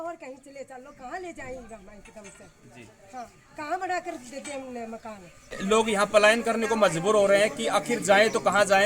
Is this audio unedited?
no; 1 cut; at 5.6 s

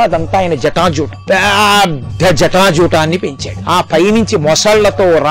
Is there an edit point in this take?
yes; 2 cuts; at 1.2 s, 3.5 s

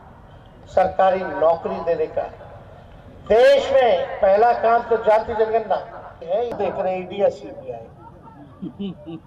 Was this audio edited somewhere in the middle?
yes; 1 cut; at 6.6 s

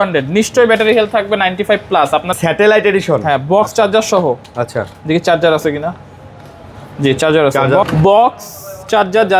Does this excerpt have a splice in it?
yes; 2 cuts; at 2.3 s, 7.8 s

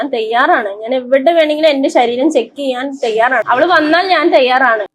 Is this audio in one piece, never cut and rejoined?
no; 1 cut; at 3.4 s

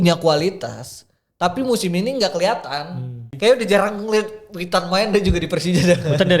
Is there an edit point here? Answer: yes; 1 cut; at 3.2 s

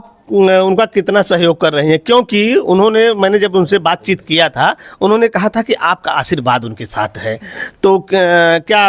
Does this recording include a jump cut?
no; 0 cuts

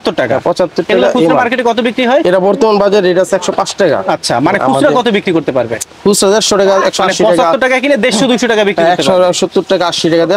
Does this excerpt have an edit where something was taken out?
no; 0 cuts

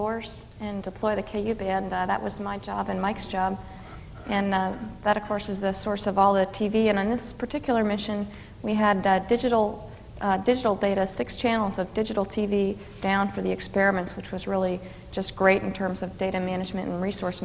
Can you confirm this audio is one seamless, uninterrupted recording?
yes; 0 cuts

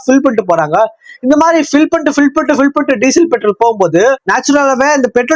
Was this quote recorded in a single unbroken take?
yes; 0 cuts

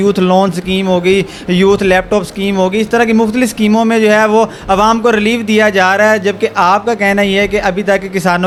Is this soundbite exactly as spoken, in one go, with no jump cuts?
yes; 0 cuts

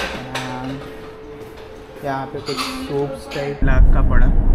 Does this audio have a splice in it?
yes; 1 cut; at 3.6 s

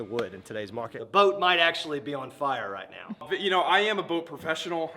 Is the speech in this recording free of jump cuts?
no; 2 cuts; at 1.0 s, 3.2 s

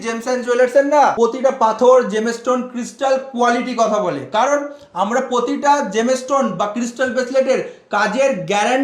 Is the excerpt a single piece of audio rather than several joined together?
no; 1 cut; at 1.1 s

